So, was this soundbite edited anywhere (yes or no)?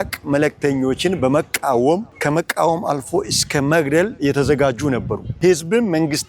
yes